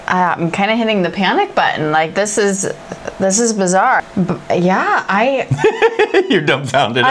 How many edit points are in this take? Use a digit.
1